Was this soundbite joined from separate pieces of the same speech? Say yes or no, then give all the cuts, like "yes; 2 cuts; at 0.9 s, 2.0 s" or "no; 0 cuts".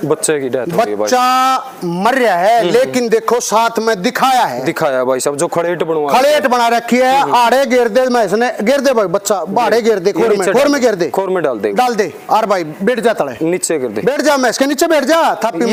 no; 0 cuts